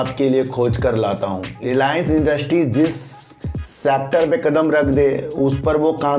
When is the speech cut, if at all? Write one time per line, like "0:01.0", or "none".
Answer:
0:01.5